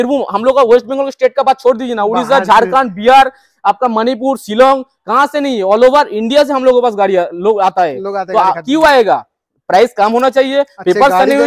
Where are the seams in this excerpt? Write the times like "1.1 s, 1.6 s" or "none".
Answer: none